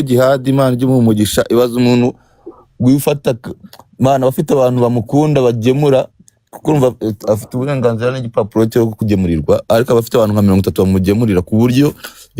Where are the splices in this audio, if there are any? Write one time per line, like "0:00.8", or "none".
none